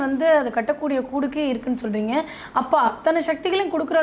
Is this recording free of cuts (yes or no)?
yes